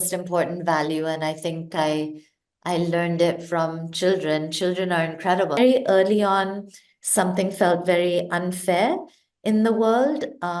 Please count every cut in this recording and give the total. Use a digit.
1